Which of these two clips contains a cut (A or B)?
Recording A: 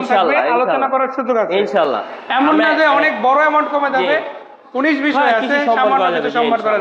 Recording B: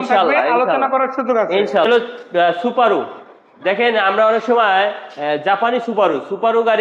B